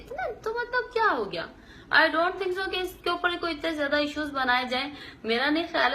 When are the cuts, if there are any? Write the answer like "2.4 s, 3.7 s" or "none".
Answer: 4.9 s